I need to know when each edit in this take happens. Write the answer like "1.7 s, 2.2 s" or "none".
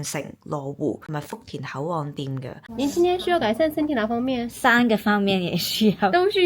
1.0 s, 2.6 s